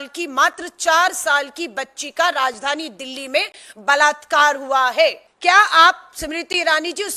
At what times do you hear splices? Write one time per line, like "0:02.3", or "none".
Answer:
0:05.3

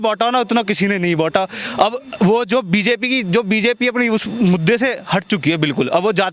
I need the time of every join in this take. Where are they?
none

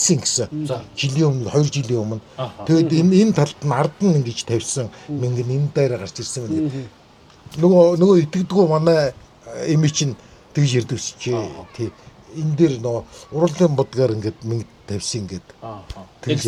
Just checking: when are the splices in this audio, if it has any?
none

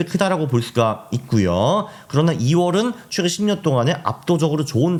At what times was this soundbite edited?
none

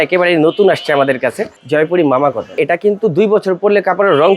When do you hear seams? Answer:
0:01.6
0:02.6

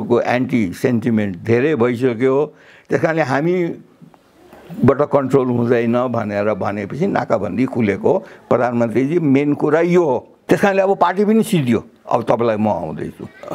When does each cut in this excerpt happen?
0:10.3

